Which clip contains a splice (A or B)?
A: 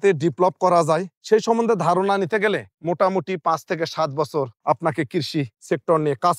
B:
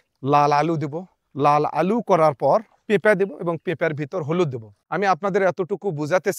B